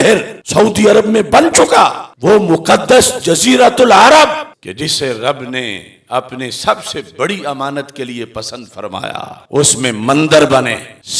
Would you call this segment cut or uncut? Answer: uncut